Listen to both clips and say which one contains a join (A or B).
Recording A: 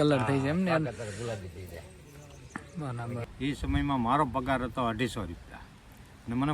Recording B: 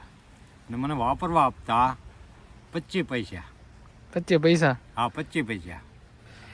A